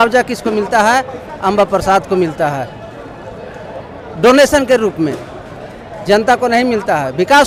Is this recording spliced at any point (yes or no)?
no